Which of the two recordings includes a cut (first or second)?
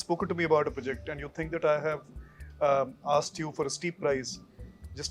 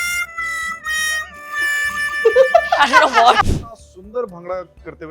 second